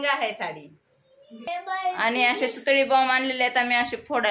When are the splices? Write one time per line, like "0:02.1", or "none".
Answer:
0:01.5